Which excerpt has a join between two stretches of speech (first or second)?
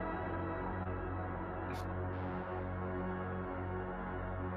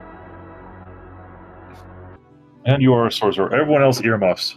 second